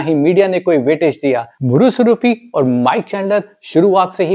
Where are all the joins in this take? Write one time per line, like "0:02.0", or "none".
0:01.5

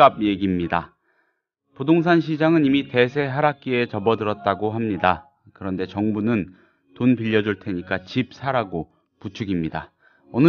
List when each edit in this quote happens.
0:07.8

